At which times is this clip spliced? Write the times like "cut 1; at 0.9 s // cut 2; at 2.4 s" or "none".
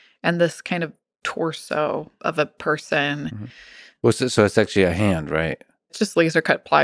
cut 1; at 2.1 s // cut 2; at 6.0 s